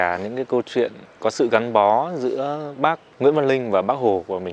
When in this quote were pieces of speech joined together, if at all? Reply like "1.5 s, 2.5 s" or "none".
1.1 s, 3.1 s